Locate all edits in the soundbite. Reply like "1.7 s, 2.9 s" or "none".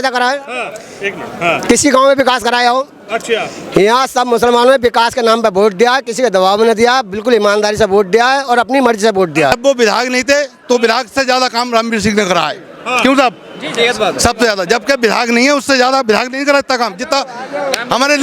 9.5 s